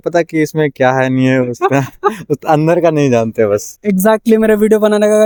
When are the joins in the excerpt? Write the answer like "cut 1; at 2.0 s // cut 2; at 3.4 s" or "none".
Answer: none